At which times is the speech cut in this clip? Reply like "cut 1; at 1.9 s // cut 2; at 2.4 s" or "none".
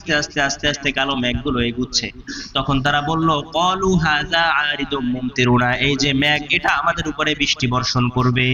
none